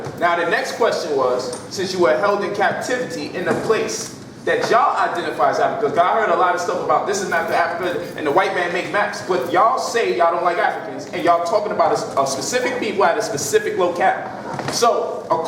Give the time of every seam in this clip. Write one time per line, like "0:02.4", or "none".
0:01.4